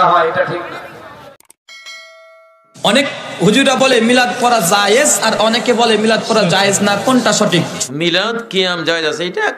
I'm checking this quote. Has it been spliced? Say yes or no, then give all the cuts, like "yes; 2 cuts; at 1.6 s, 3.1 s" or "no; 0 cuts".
yes; 2 cuts; at 1.3 s, 7.7 s